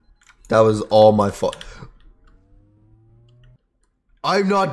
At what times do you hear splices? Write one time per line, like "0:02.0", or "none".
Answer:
0:03.6